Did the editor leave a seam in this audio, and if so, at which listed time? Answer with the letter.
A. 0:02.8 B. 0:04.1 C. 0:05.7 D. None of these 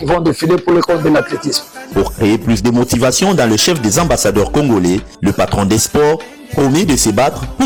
D